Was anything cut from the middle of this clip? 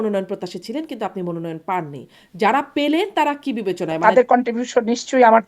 yes; 1 cut; at 4.0 s

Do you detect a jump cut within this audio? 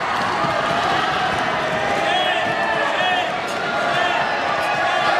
no; 0 cuts

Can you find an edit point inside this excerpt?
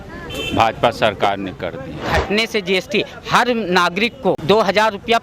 yes; 2 cuts; at 2.0 s, 4.4 s

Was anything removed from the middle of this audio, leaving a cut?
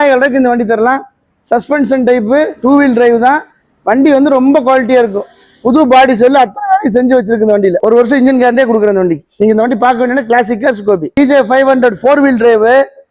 yes; 1 cut; at 7.8 s

